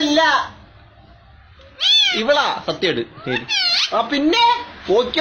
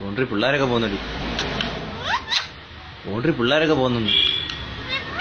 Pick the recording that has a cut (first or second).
second